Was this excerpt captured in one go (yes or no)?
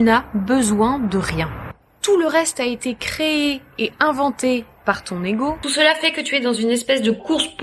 no